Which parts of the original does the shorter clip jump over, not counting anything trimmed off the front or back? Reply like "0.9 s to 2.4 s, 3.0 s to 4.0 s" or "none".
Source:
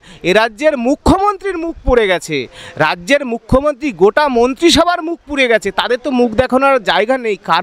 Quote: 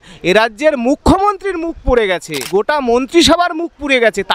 2.4 s to 3.9 s